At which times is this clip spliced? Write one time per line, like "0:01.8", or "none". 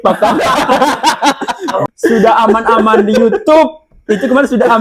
0:01.8